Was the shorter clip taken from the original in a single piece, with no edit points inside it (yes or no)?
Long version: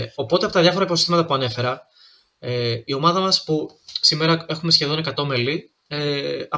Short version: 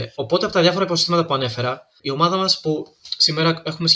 no